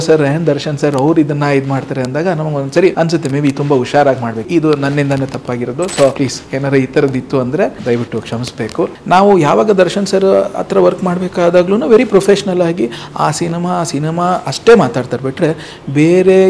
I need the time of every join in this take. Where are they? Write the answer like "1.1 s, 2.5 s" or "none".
2.9 s, 4.4 s, 6.1 s, 7.8 s, 9.0 s